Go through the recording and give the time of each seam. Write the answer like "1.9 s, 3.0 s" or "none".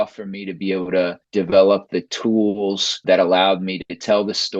1.2 s, 3.0 s